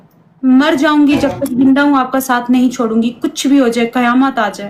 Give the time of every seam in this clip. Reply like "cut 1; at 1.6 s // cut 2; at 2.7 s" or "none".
none